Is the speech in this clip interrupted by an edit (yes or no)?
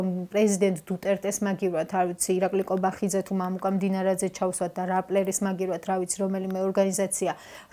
no